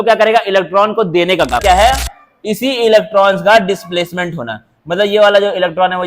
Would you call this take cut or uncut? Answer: cut